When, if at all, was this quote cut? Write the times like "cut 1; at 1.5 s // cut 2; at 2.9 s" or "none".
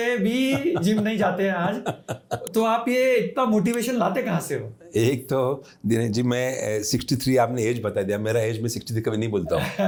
none